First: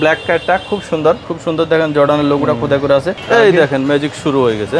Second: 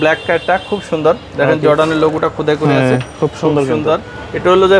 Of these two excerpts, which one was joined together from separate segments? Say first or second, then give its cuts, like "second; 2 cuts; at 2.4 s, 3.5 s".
first; 2 cuts; at 1.3 s, 3.2 s